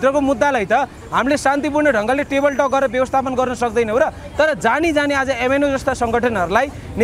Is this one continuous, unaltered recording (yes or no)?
yes